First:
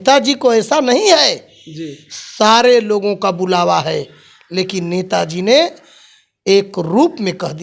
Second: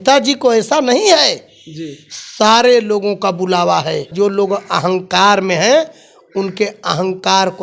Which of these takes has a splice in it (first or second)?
second